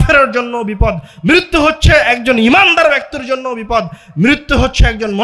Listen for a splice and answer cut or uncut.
uncut